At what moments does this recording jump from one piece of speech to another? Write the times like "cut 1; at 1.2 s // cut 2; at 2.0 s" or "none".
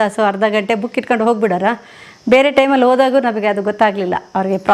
none